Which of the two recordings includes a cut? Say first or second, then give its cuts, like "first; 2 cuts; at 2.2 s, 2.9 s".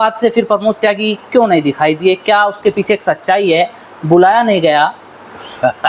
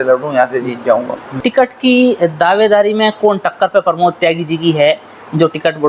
second; 1 cut; at 1.4 s